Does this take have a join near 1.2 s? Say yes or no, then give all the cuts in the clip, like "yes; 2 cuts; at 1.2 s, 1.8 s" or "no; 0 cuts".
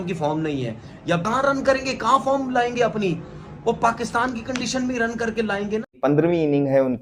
yes; 2 cuts; at 1.2 s, 5.9 s